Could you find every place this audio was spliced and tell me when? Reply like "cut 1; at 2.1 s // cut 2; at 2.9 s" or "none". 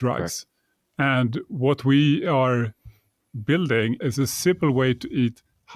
cut 1; at 4.0 s